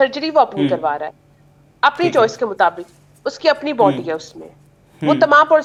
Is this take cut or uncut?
uncut